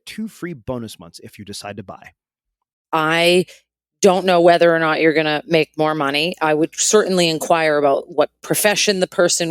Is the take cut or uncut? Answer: cut